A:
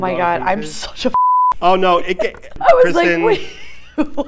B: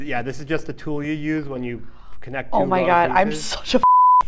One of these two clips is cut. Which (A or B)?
A